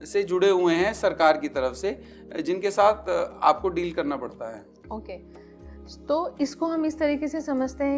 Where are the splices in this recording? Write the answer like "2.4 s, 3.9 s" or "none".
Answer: none

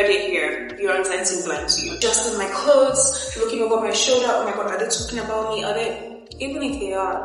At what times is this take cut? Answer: 2.0 s

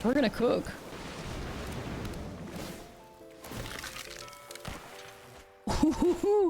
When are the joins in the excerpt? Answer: 0.9 s, 5.3 s

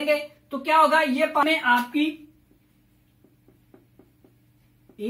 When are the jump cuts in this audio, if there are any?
1.4 s

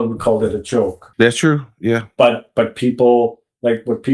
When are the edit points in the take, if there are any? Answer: 1.0 s

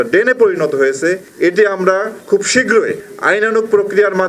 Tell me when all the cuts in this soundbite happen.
3.1 s

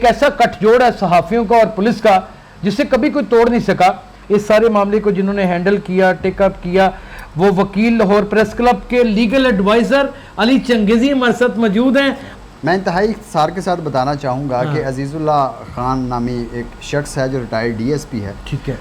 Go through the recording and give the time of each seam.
4.1 s, 12.3 s

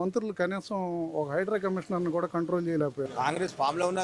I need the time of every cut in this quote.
3.1 s

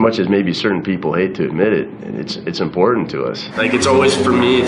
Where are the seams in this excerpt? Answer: 3.5 s

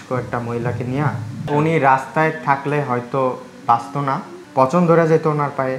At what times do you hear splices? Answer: 1.3 s

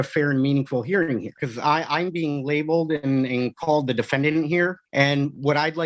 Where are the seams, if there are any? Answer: 1.5 s, 4.8 s

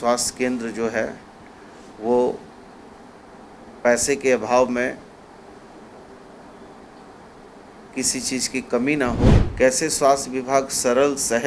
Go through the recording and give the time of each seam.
9.4 s

